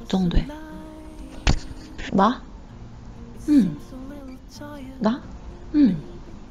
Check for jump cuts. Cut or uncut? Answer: uncut